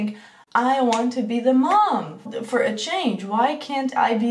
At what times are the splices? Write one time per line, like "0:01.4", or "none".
0:02.3